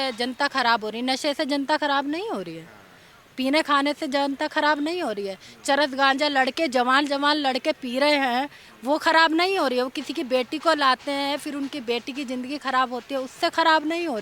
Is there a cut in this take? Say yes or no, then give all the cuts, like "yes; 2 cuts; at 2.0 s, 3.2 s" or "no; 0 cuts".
no; 0 cuts